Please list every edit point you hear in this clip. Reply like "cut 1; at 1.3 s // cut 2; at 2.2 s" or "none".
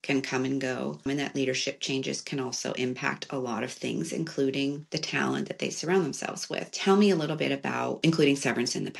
cut 1; at 1.1 s // cut 2; at 4.9 s // cut 3; at 6.7 s // cut 4; at 8.0 s